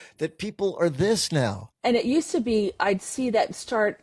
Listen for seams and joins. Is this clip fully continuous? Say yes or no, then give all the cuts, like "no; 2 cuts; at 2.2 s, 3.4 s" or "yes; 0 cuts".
no; 1 cut; at 1.7 s